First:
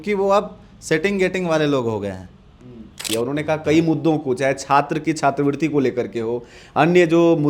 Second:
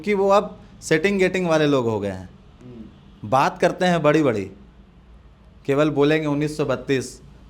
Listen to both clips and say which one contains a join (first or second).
first